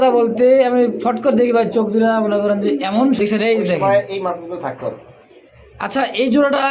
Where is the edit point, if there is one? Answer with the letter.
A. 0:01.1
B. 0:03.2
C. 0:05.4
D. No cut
B